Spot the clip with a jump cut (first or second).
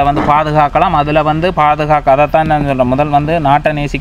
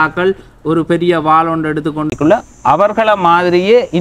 second